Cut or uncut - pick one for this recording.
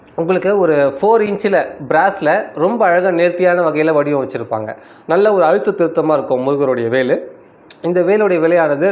uncut